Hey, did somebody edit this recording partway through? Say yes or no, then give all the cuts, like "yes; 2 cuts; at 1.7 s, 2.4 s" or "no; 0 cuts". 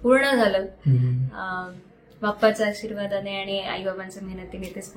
no; 0 cuts